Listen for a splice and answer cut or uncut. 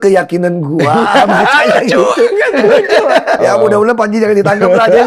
cut